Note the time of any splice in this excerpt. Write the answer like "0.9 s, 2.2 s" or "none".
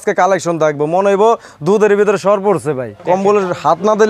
2.9 s